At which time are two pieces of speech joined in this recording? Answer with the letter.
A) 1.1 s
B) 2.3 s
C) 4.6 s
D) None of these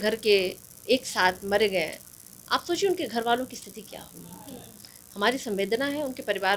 D